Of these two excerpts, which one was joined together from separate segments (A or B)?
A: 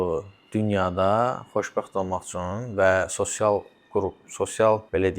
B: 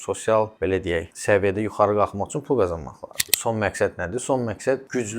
B